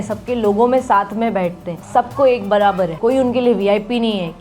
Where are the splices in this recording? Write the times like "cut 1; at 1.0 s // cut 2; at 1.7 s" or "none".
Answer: cut 1; at 1.7 s // cut 2; at 2.9 s

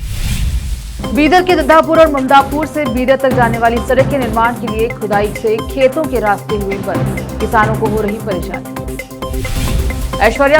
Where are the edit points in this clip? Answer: cut 1; at 0.9 s

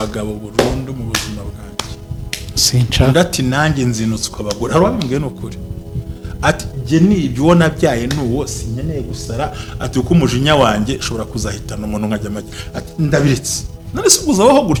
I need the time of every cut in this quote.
none

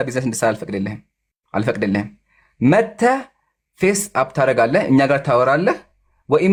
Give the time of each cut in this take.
none

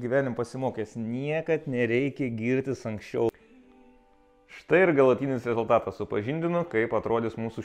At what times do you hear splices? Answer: cut 1; at 3.3 s

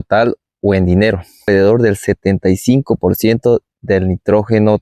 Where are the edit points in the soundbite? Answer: cut 1; at 1.5 s

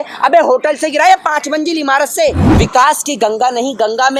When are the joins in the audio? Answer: cut 1; at 2.4 s

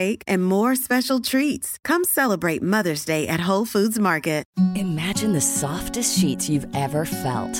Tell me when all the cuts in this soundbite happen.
cut 1; at 4.5 s

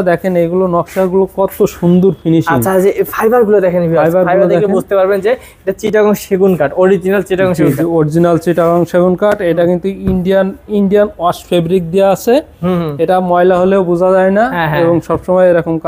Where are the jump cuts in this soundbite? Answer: none

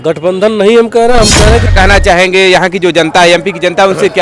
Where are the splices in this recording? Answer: cut 1; at 1.7 s

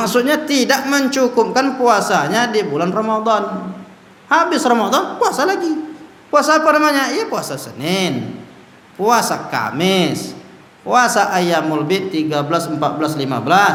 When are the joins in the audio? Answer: none

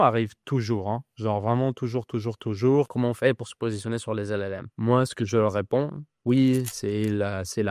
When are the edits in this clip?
cut 1; at 2.9 s // cut 2; at 4.8 s // cut 3; at 6.1 s

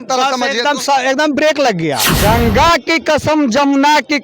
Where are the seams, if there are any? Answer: cut 1; at 2.1 s

